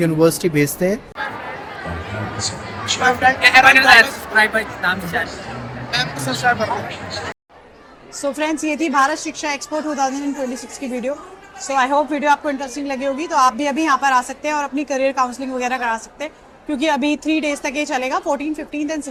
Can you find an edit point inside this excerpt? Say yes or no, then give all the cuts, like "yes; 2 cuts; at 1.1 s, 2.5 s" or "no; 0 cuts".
no; 0 cuts